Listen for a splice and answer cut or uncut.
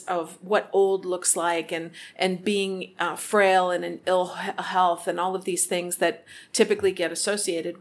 uncut